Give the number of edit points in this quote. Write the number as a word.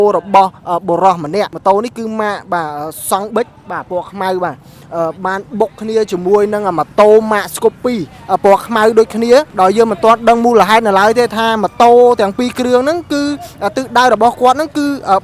two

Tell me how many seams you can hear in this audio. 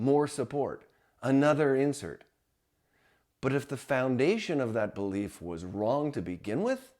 zero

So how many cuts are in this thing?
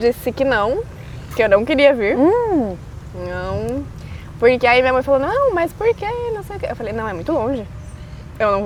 zero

